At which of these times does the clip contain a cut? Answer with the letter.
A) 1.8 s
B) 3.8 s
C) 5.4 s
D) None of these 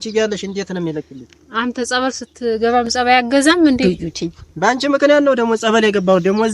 B